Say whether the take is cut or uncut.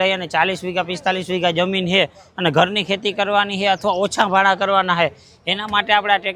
uncut